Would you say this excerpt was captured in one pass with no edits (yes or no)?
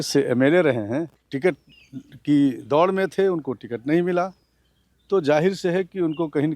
no